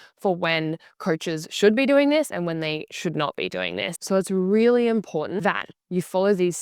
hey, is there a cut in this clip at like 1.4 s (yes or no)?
no